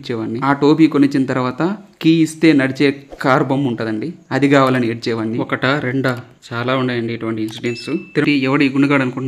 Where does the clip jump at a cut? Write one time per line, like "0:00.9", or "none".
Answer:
0:08.2